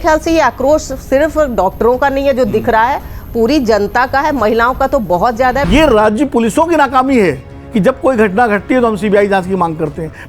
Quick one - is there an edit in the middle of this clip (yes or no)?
yes